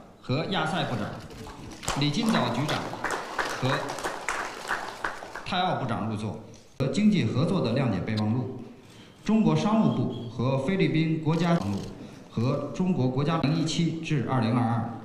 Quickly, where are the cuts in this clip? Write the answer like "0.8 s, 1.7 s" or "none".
6.1 s